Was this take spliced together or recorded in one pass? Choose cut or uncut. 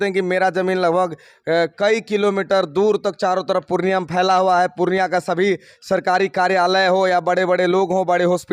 uncut